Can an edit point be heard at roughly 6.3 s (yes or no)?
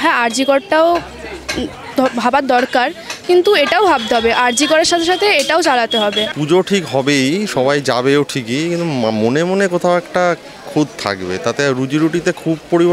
yes